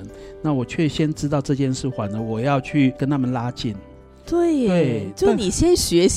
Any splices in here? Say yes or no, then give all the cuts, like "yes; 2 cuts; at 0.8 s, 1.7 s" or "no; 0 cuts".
no; 0 cuts